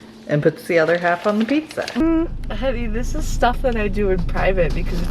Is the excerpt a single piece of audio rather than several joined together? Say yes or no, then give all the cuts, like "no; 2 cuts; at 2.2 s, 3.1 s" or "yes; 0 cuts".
no; 1 cut; at 2.0 s